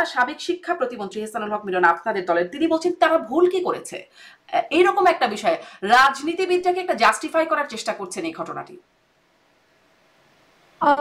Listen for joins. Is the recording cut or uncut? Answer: uncut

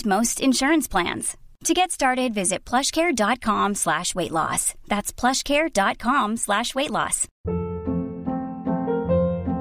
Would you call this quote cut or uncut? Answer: cut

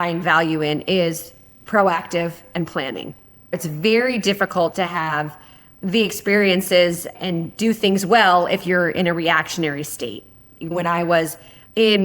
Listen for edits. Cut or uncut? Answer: cut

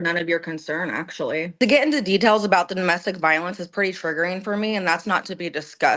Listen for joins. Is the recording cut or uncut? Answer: cut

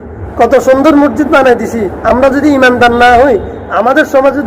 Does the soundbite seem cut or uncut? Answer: cut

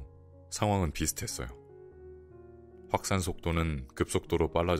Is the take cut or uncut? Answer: uncut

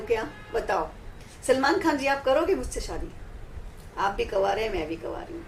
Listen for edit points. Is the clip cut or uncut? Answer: uncut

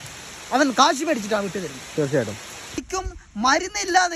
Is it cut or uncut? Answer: cut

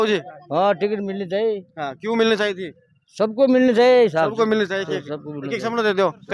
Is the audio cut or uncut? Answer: uncut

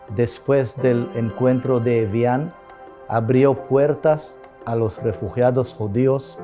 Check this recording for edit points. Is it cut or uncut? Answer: uncut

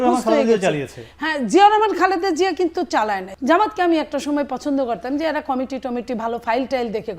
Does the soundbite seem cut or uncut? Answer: cut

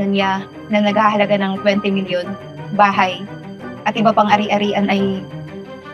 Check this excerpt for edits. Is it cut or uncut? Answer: uncut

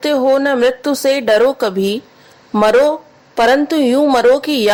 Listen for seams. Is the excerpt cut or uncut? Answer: uncut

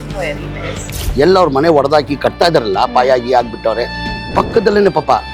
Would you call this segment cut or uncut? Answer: cut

